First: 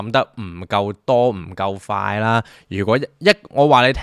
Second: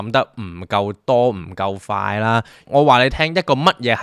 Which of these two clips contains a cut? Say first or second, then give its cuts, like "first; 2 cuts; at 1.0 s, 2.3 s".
second; 1 cut; at 2.6 s